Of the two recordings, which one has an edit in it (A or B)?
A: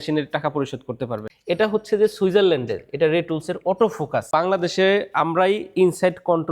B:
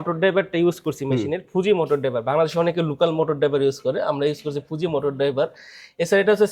A